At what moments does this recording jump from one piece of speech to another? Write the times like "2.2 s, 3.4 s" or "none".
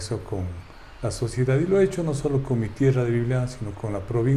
none

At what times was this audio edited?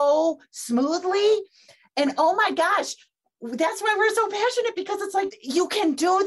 5.4 s

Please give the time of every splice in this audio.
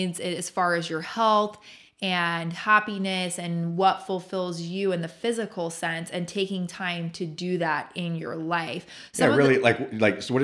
none

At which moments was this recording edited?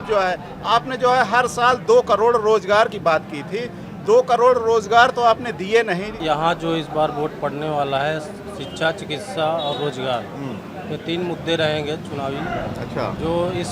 6.2 s

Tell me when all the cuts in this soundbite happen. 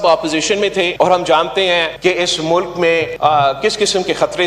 0.9 s, 1.9 s, 3.1 s

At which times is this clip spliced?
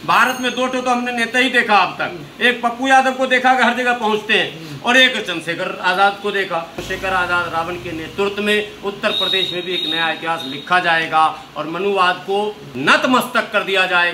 6.8 s, 12.6 s

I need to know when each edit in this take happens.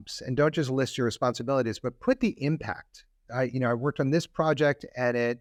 none

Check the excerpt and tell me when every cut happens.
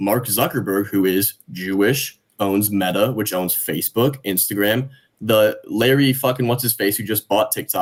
none

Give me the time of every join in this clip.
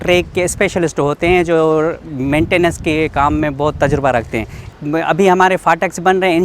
4.7 s

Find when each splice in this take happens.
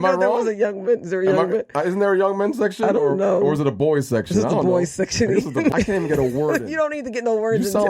5.7 s

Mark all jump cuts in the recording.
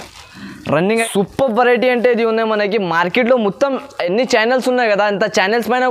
1.0 s

